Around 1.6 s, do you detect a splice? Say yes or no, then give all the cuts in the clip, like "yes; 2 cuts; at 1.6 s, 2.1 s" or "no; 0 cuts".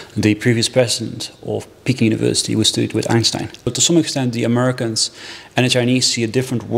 no; 1 cut; at 3.7 s